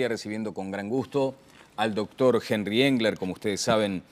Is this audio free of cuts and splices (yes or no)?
yes